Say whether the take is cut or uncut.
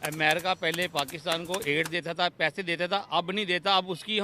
uncut